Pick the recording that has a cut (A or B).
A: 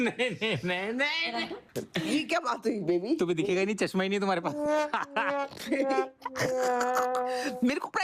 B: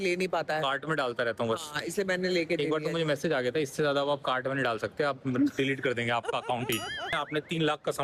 B